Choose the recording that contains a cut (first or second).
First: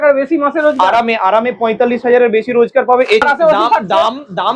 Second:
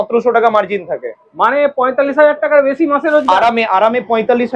first